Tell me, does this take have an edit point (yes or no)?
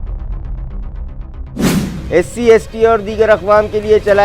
yes